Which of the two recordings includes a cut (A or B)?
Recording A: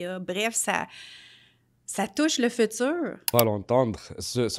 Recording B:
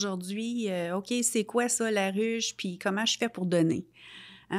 A